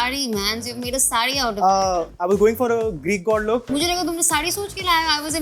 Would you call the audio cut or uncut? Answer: uncut